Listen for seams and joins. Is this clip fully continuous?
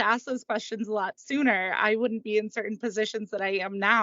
yes; 0 cuts

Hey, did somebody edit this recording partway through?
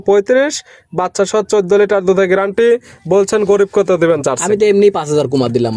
no; 0 cuts

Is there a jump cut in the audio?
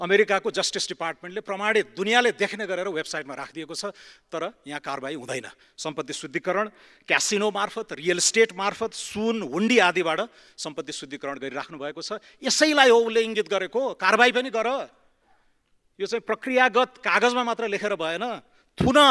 no; 0 cuts

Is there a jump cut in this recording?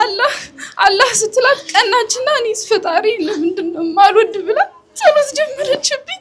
no; 0 cuts

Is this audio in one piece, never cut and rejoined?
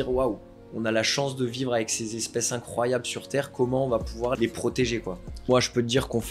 no; 2 cuts; at 4.4 s, 5.4 s

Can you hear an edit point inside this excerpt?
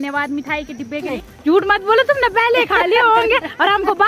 yes; 1 cut; at 1.2 s

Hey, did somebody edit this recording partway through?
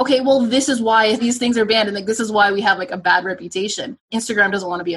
yes; 2 cuts; at 1.2 s, 4.0 s

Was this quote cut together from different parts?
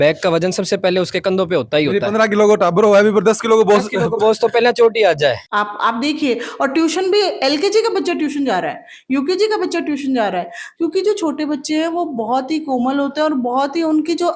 yes; 2 cuts; at 5.4 s, 10.7 s

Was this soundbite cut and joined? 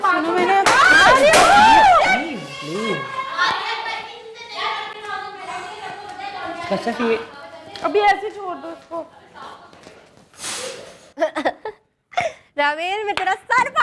no; 0 cuts

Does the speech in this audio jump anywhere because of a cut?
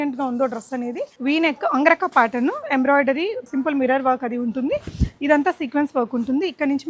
yes; 2 cuts; at 1.1 s, 3.5 s

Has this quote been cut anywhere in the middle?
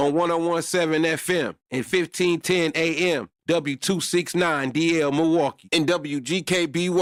no; 0 cuts

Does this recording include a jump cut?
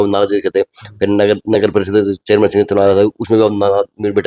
no; 0 cuts

